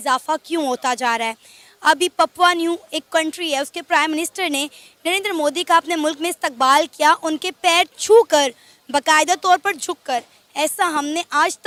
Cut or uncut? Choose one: uncut